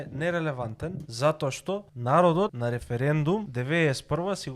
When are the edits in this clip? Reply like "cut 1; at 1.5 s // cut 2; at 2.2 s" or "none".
cut 1; at 1.0 s // cut 2; at 1.9 s // cut 3; at 2.6 s // cut 4; at 3.5 s